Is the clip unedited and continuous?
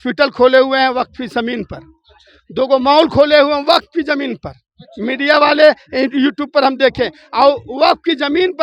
yes; 0 cuts

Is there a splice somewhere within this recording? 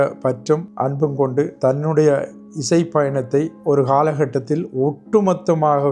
yes; 2 cuts; at 1.1 s, 3.5 s

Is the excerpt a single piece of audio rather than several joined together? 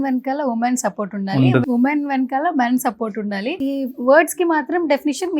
no; 2 cuts; at 1.6 s, 3.6 s

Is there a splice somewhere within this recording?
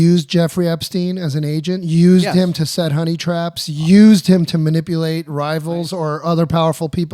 no; 0 cuts

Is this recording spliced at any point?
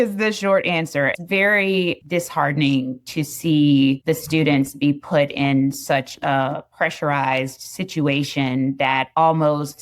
yes; 1 cut; at 1.2 s

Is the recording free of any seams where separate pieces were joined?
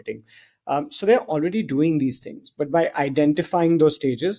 yes; 0 cuts

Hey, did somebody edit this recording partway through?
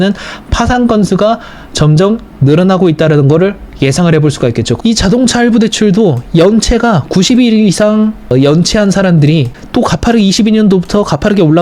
yes; 3 cuts; at 4.7 s, 8.3 s, 9.6 s

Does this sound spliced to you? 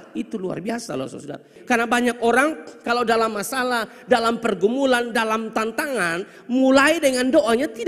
yes; 1 cut; at 1.5 s

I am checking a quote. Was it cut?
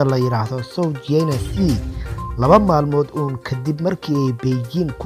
no; 0 cuts

